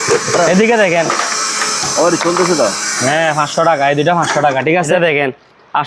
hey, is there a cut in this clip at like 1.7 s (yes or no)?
no